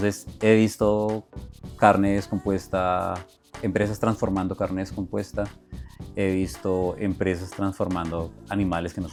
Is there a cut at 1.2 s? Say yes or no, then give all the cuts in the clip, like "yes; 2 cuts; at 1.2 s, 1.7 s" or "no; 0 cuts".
no; 0 cuts